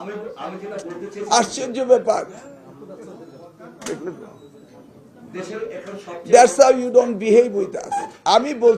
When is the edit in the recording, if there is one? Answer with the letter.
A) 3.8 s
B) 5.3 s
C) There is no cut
C